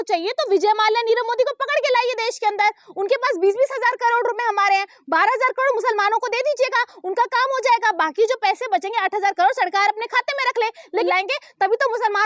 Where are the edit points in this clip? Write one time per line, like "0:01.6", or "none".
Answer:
0:11.1